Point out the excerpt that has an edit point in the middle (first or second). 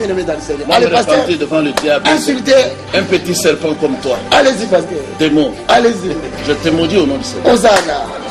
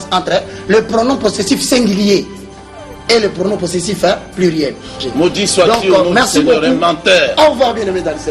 second